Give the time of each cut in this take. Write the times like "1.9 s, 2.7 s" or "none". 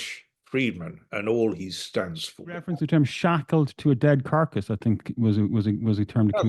2.7 s

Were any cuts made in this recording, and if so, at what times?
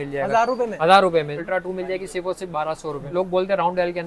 1.4 s, 3.1 s

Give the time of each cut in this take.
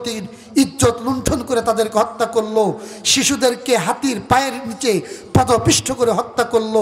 none

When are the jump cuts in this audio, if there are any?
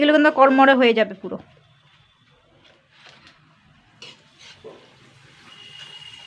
2.9 s

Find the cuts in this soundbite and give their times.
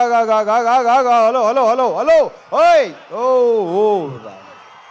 none

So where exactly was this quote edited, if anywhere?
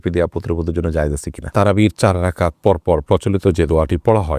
1.4 s

